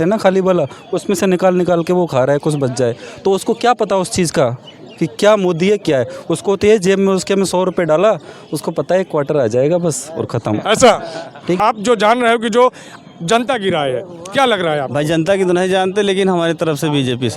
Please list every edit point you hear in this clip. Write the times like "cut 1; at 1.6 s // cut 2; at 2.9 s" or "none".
cut 1; at 11.6 s